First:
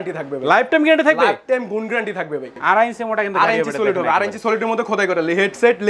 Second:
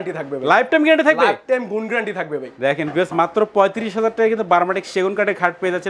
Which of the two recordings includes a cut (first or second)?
first